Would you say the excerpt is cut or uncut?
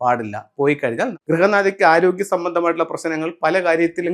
cut